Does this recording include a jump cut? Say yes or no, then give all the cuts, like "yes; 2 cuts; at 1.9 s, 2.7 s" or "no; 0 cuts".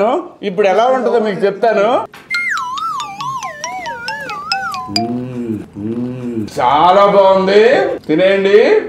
yes; 3 cuts; at 2.2 s, 6.5 s, 8.0 s